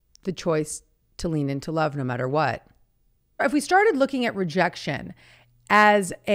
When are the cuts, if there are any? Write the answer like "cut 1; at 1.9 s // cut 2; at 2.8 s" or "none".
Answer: cut 1; at 3.4 s